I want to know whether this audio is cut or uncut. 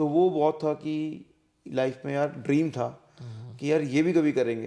uncut